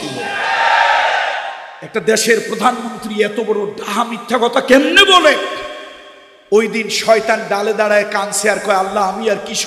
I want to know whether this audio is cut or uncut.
uncut